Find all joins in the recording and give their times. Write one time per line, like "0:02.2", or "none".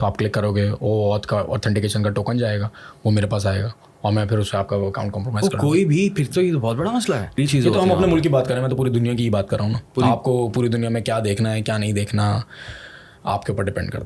0:07.5